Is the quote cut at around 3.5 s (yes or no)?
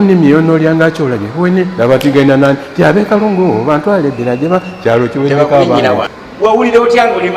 no